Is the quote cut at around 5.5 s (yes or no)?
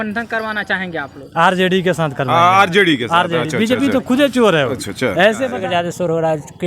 yes